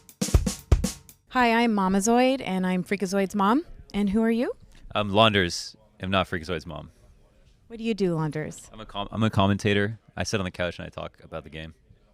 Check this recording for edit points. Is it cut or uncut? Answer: cut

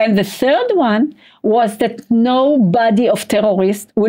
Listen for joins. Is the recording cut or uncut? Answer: uncut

